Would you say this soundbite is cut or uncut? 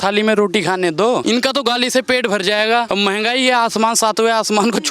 cut